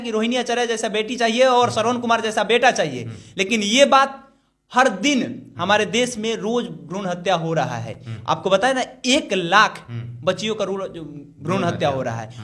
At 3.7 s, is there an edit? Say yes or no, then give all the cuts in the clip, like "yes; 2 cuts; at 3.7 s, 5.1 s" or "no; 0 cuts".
no; 0 cuts